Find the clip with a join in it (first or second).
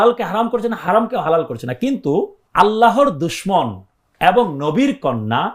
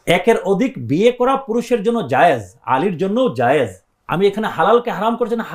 first